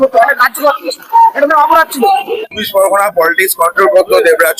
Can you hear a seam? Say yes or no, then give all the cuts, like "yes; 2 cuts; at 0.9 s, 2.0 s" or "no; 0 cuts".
yes; 1 cut; at 2.3 s